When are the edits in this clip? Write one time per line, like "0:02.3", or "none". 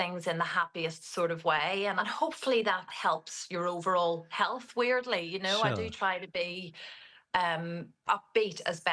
0:02.0
0:02.9